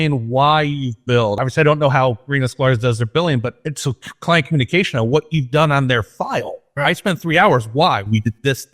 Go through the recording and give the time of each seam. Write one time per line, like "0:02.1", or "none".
0:01.4
0:03.6
0:06.6